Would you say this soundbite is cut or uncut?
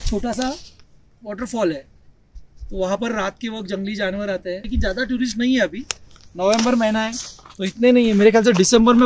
cut